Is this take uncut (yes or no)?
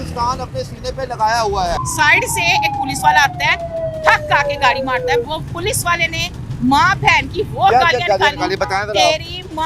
no